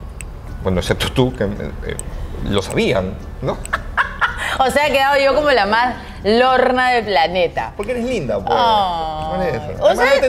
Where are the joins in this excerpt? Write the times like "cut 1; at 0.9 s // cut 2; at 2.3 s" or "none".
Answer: none